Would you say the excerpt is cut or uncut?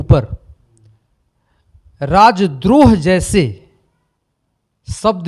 uncut